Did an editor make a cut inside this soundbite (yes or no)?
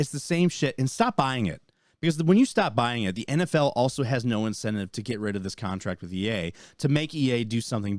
no